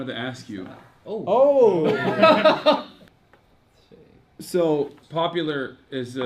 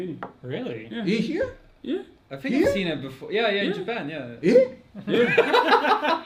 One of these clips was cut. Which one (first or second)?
first